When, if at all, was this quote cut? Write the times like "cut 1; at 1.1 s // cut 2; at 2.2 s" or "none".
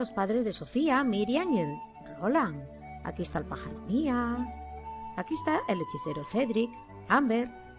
none